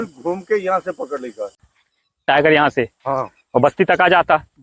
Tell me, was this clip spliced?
yes; 1 cut; at 1.6 s

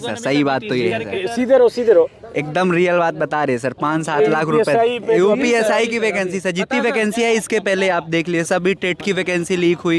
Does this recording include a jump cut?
no; 0 cuts

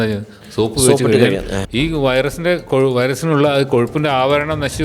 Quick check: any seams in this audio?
yes; 1 cut; at 1.6 s

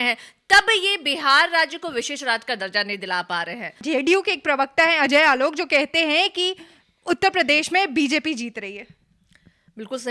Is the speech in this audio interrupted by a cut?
yes; 1 cut; at 3.7 s

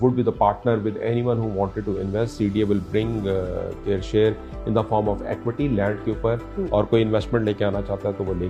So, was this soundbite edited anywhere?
no; 0 cuts

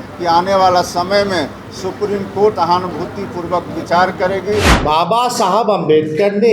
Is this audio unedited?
no; 2 cuts; at 2.5 s, 4.7 s

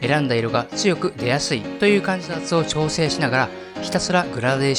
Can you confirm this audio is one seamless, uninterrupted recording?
no; 1 cut; at 2.2 s

